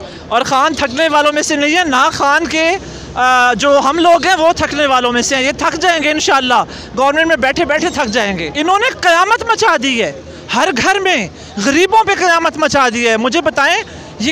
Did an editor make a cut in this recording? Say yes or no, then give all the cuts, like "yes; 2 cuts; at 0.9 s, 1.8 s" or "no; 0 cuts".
yes; 1 cut; at 8.5 s